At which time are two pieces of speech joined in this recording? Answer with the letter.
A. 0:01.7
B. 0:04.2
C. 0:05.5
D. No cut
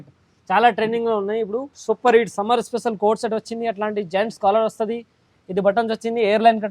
A